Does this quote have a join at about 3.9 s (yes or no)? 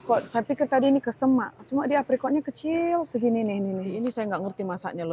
yes